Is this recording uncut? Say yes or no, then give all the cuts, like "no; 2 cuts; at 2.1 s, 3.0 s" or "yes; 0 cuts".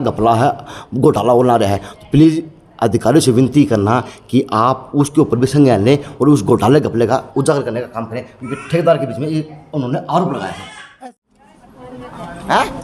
no; 1 cut; at 11.0 s